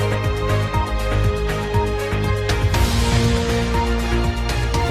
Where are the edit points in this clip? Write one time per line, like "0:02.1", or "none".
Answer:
0:02.6